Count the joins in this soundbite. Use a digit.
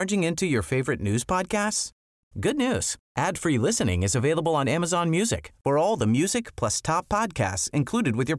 0